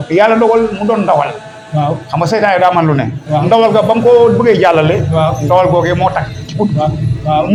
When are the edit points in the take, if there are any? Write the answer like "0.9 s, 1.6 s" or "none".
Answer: none